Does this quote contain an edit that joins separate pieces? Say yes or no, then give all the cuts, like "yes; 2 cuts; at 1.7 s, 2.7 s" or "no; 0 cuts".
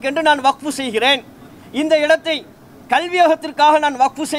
no; 0 cuts